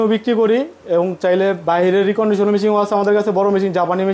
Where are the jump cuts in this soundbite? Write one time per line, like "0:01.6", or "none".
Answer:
none